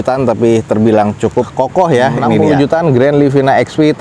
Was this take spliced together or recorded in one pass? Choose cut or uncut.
cut